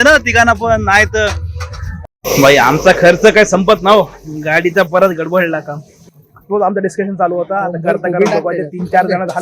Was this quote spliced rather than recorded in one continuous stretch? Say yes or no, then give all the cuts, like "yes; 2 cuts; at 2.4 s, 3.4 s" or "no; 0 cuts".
yes; 2 cuts; at 2.1 s, 6.2 s